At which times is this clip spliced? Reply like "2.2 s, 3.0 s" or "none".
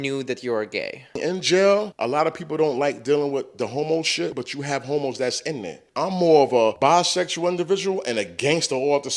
1.2 s, 1.9 s, 4.3 s, 5.8 s, 6.8 s